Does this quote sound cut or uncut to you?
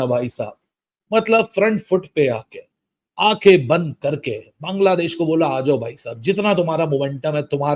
uncut